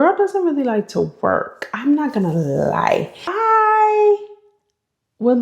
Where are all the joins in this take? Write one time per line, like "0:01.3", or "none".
0:03.2